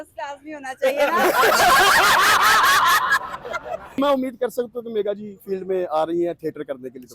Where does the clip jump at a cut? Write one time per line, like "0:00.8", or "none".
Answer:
0:04.0